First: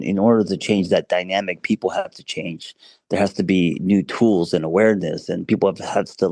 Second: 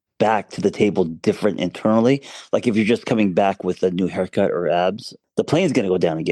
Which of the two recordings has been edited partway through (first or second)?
second